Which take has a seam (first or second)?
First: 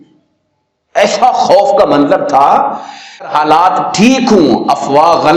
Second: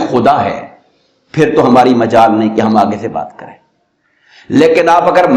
first